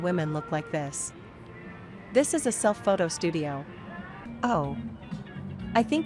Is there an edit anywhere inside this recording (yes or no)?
yes